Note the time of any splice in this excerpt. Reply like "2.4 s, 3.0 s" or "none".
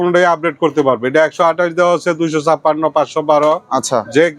none